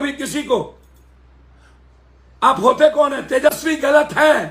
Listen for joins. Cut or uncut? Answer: uncut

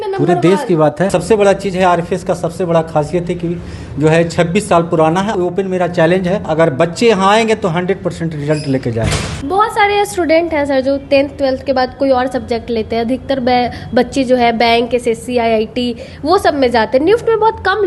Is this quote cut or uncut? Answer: cut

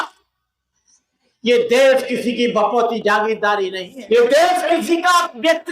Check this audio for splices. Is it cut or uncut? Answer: cut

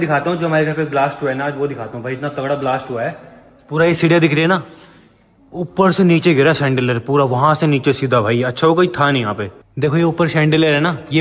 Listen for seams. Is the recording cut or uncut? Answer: uncut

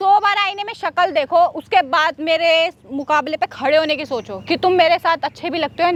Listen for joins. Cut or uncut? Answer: uncut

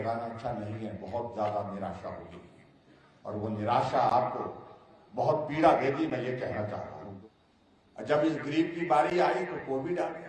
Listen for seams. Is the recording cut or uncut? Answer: cut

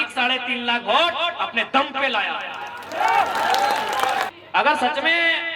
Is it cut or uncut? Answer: cut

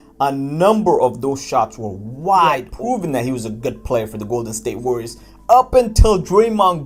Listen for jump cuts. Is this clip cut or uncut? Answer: cut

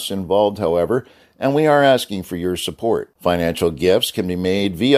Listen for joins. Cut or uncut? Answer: uncut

